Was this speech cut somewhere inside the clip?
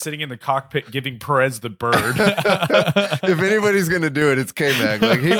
no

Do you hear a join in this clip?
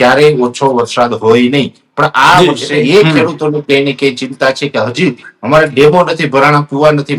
yes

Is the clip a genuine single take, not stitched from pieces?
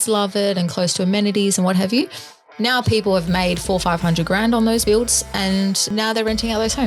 no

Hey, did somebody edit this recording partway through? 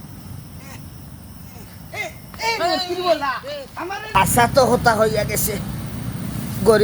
yes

